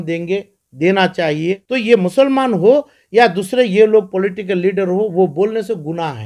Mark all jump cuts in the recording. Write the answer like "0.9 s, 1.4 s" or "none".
1.6 s